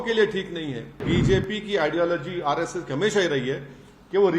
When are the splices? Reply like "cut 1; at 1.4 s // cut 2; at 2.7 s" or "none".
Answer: cut 1; at 1.0 s